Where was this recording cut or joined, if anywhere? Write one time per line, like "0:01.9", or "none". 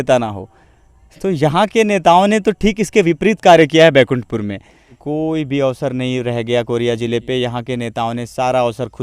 0:05.0